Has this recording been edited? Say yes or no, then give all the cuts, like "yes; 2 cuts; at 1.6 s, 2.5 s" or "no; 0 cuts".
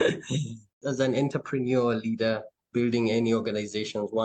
yes; 1 cut; at 2.5 s